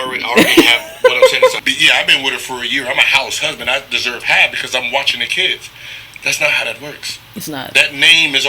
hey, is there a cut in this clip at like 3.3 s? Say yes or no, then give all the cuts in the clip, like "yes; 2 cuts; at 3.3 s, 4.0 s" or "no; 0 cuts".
no; 1 cut; at 1.6 s